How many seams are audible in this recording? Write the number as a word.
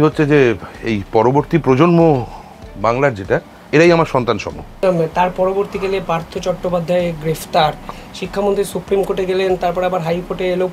three